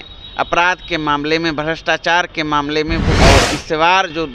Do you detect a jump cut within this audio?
yes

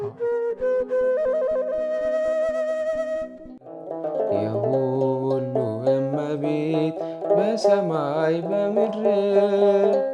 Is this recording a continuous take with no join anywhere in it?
yes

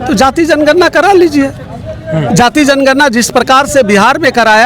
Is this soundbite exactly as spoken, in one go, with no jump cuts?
yes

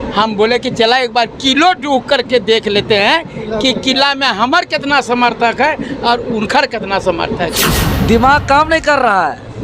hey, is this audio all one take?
no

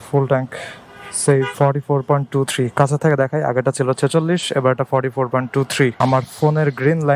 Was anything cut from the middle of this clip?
yes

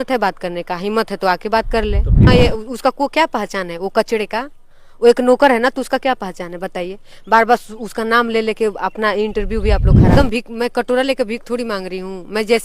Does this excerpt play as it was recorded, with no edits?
no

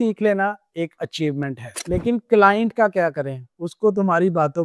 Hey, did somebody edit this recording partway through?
no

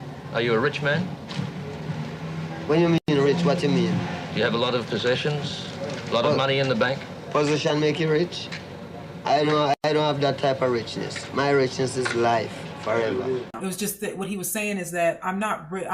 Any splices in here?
yes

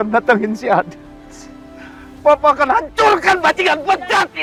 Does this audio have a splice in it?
no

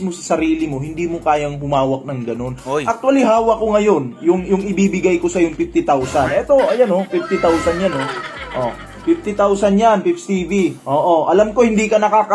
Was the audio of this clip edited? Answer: no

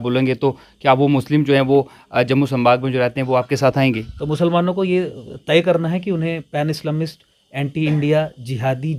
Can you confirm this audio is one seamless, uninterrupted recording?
yes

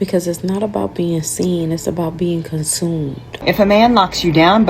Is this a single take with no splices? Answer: no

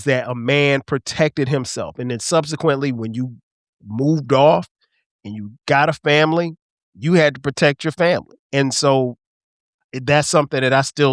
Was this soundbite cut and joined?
yes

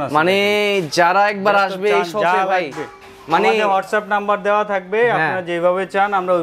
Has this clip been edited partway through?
no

